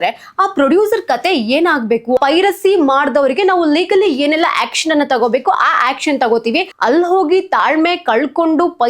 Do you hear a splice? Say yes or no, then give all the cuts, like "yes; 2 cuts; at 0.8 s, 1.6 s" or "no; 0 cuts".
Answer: yes; 2 cuts; at 2.2 s, 6.7 s